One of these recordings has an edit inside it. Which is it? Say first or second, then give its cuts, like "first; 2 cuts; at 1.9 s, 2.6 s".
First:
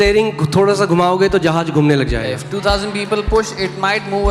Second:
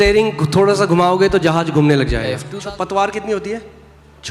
second; 1 cut; at 2.5 s